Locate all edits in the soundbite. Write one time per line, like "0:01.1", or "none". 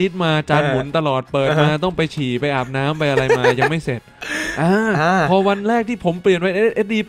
none